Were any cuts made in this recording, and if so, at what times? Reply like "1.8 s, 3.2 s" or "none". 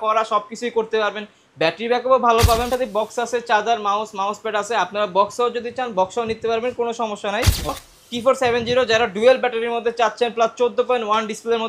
2.7 s, 7.7 s